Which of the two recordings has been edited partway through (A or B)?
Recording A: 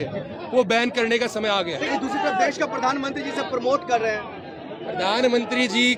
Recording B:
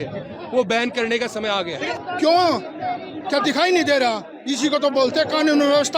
B